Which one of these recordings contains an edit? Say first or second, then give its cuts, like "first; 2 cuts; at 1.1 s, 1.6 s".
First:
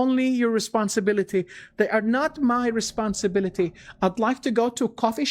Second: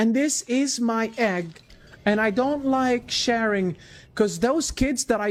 first; 1 cut; at 4.1 s